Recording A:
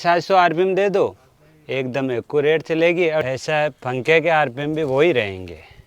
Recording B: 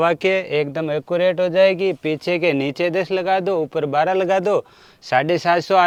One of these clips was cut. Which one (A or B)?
A